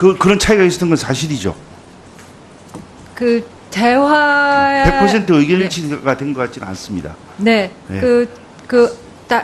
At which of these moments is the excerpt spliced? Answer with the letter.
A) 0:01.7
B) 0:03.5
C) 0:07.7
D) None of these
C